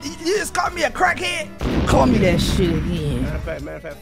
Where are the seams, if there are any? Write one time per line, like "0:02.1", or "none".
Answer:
none